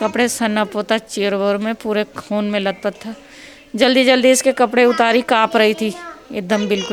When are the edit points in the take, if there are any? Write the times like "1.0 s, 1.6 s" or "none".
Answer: none

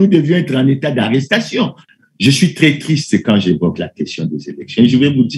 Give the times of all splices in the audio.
1.8 s

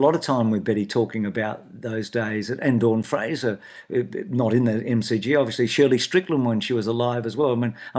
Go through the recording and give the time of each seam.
none

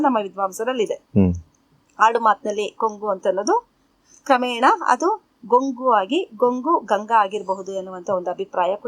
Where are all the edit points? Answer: none

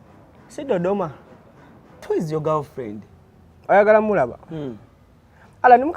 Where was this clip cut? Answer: 2.0 s

